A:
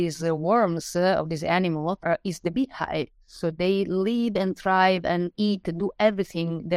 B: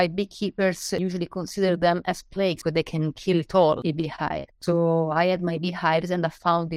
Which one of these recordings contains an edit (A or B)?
B